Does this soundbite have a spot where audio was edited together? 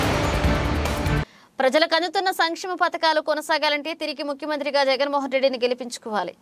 yes; 1 cut; at 1.2 s

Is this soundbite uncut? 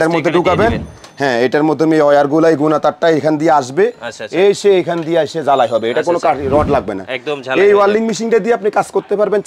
yes; 0 cuts

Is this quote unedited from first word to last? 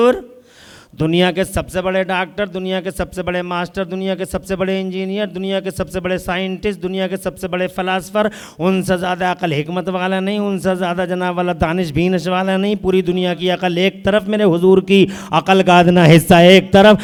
yes; 0 cuts

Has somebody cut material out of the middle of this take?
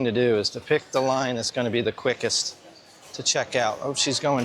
no; 0 cuts

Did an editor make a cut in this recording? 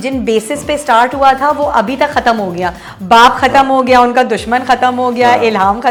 no; 0 cuts

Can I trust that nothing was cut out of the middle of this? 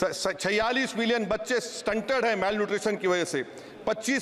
yes; 0 cuts

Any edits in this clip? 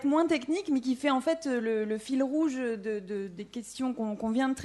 no; 0 cuts

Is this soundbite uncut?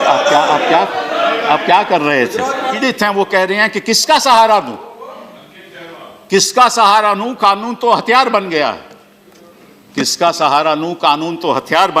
no; 1 cut; at 2.8 s

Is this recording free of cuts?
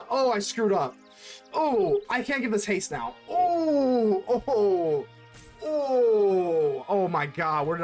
yes; 0 cuts

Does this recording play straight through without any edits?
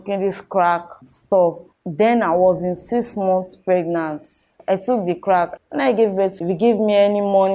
no; 3 cuts; at 1.7 s, 5.5 s, 6.4 s

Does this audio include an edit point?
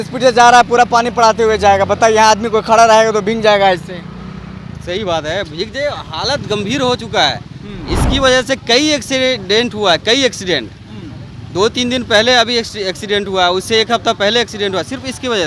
no; 0 cuts

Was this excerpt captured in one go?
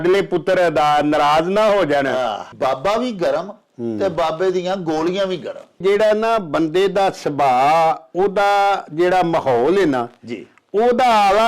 no; 2 cuts; at 2.5 s, 5.8 s

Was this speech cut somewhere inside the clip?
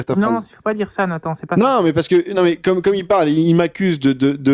no; 0 cuts

